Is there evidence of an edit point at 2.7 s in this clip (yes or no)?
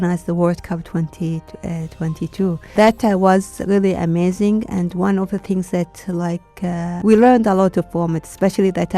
yes